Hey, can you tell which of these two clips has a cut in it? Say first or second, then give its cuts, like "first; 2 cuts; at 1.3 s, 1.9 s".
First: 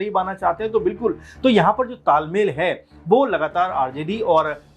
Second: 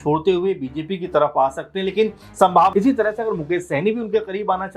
second; 1 cut; at 2.7 s